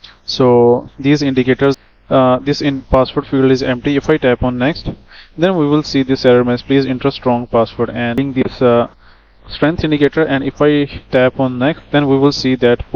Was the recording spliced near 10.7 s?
no; 2 cuts; at 1.8 s, 8.2 s

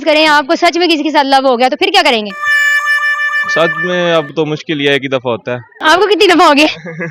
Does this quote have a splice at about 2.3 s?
no; 0 cuts

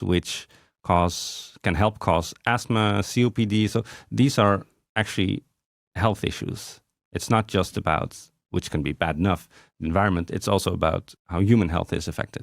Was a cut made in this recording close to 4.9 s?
no; 1 cut; at 11.2 s

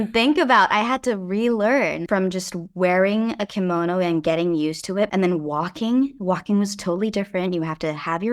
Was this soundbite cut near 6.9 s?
no; 2 cuts; at 2.0 s, 5.1 s

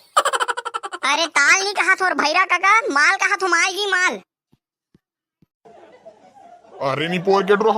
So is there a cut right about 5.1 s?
no; 1 cut; at 0.9 s

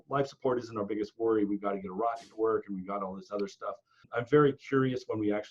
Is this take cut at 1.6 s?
no; 1 cut; at 4.1 s

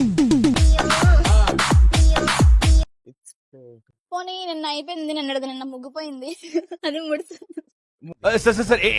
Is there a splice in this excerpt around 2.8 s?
yes; 1 cut; at 2.8 s

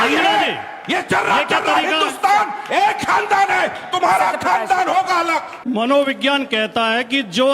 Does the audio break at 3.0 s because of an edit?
no; 1 cut; at 5.5 s

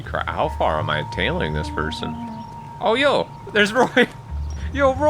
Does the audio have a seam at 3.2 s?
no; 1 cut; at 1.7 s

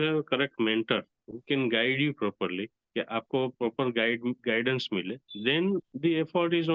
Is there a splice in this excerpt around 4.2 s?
no; 0 cuts

